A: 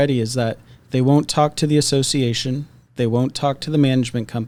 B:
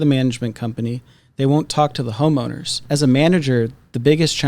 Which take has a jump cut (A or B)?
B